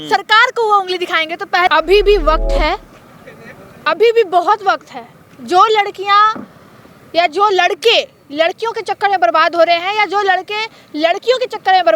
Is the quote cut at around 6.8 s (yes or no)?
no